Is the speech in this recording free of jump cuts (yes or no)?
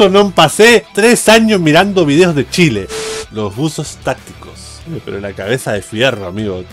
no